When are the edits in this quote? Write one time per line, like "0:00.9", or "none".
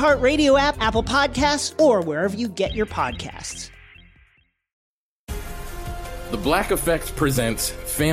0:04.8